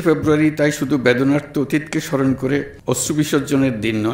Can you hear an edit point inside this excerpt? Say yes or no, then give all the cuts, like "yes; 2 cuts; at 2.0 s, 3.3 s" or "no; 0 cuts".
yes; 1 cut; at 2.7 s